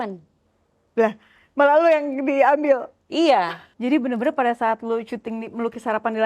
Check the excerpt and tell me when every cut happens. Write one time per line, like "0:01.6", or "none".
0:03.6